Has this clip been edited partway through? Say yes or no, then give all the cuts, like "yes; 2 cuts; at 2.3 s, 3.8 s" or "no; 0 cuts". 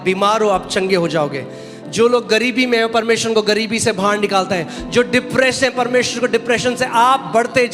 no; 0 cuts